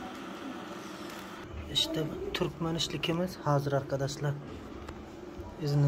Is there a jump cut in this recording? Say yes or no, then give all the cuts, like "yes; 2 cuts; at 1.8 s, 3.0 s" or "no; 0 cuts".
yes; 1 cut; at 1.5 s